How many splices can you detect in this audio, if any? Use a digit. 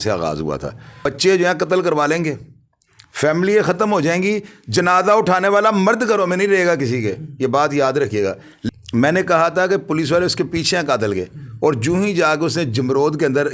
2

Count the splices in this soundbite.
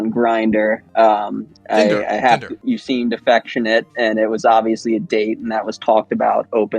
1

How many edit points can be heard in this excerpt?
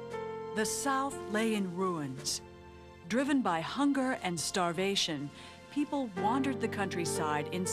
1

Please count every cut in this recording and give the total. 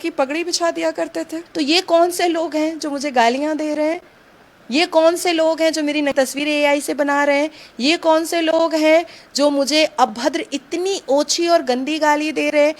1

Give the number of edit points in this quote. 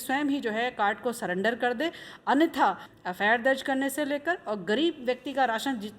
1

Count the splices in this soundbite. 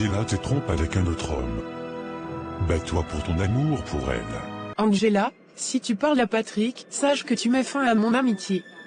1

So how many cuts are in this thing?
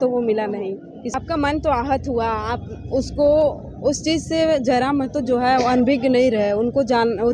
1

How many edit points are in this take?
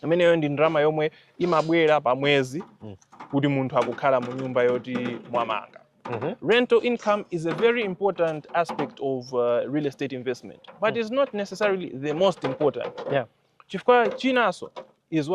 0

